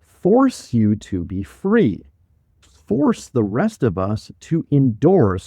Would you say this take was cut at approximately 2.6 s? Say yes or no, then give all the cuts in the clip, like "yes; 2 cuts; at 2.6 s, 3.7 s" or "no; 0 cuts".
yes; 1 cut; at 2.6 s